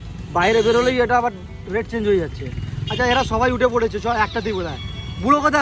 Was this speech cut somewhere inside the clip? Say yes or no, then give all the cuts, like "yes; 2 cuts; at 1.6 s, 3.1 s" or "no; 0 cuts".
no; 0 cuts